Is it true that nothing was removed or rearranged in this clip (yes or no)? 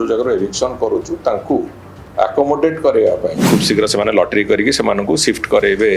no